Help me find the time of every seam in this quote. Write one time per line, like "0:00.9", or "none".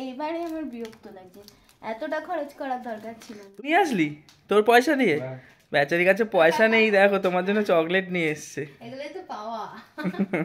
0:03.6